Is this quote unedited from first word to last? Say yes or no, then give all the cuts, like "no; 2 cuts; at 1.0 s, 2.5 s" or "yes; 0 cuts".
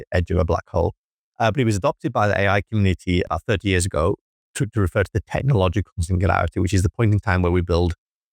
no; 1 cut; at 3.3 s